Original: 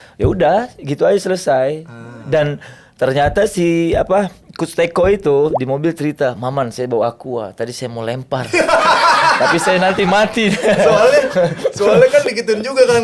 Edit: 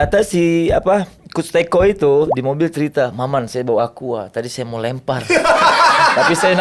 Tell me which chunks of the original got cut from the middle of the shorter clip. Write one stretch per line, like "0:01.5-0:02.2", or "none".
none